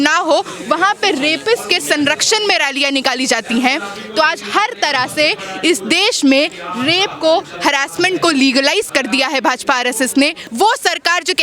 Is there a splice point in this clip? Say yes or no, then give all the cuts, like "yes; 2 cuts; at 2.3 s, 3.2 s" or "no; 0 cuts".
yes; 1 cut; at 10.4 s